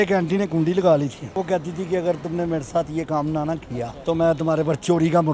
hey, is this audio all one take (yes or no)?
no